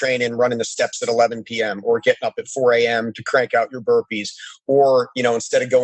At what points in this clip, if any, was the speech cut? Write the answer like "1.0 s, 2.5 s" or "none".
none